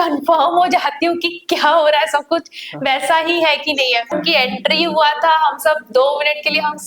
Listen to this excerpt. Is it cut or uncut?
cut